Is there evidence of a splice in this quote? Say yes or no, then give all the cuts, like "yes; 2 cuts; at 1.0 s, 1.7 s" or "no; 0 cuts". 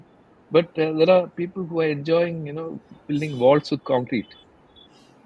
no; 0 cuts